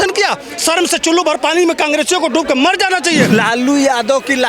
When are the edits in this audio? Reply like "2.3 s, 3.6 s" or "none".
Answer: 3.3 s